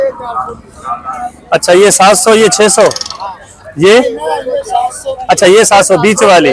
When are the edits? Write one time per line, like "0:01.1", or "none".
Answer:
none